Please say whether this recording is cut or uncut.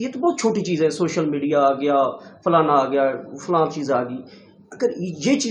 uncut